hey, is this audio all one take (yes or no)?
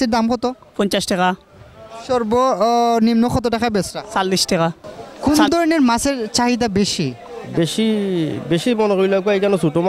no